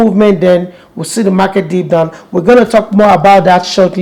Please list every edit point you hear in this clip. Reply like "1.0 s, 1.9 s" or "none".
none